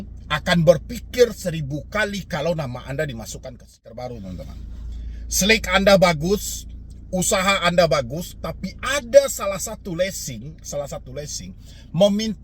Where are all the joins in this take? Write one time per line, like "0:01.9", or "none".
0:03.9